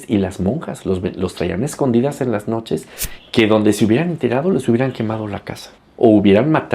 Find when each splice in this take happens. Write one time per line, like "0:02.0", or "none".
0:03.0